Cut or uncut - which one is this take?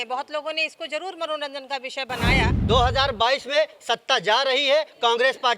cut